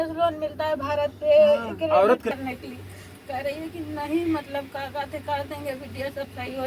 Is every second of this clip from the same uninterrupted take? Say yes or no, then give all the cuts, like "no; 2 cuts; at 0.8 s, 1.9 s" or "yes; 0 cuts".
no; 1 cut; at 2.3 s